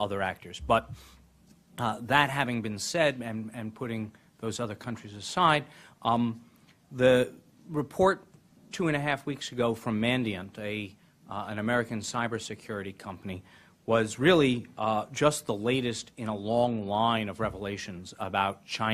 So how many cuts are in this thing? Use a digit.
1